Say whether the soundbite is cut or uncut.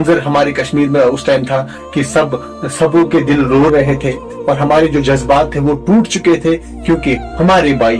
uncut